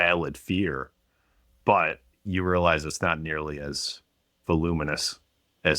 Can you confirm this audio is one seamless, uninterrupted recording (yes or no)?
yes